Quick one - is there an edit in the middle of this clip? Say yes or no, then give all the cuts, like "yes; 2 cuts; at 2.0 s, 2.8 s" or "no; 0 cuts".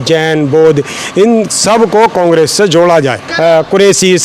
yes; 1 cut; at 3.2 s